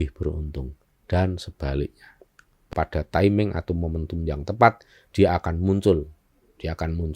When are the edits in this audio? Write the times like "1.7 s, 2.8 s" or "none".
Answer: 2.7 s